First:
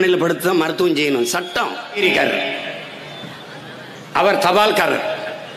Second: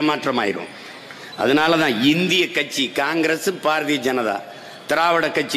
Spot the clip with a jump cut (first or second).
first